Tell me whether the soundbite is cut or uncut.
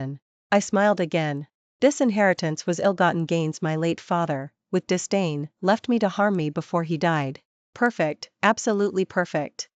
uncut